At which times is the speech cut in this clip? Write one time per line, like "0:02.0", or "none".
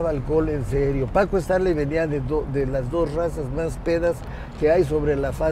none